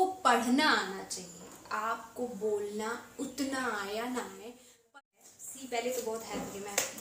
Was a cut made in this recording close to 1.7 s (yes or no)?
no